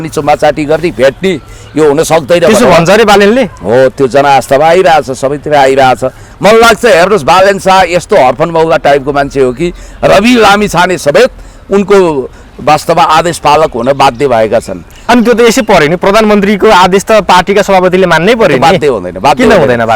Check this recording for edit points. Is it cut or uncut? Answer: cut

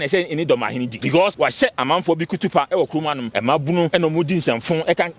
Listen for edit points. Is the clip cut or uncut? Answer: cut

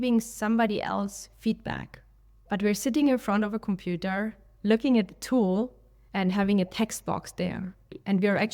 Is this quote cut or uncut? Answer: uncut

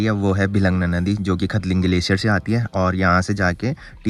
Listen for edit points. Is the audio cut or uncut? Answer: uncut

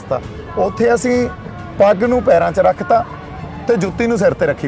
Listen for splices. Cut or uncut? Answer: uncut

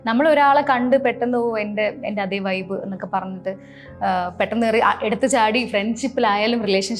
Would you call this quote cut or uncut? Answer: uncut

